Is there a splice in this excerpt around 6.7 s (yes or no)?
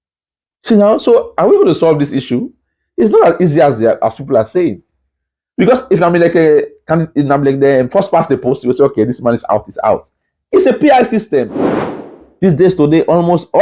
no